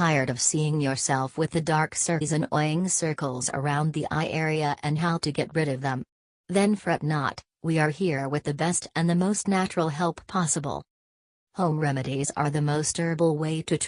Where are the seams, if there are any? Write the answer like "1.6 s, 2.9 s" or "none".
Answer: none